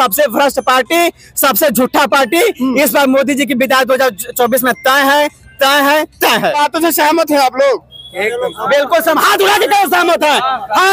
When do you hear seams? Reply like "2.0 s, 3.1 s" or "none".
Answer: 6.5 s